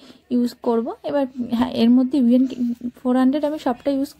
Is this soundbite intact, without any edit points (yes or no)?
yes